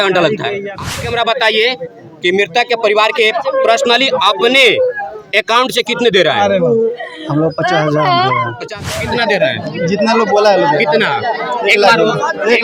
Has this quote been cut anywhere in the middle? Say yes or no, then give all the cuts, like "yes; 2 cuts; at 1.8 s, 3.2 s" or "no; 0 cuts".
yes; 2 cuts; at 1.0 s, 8.7 s